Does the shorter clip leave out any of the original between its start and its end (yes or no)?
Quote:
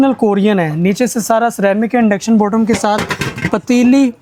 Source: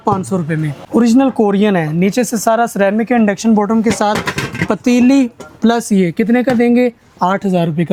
no